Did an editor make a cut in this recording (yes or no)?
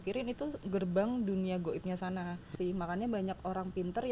yes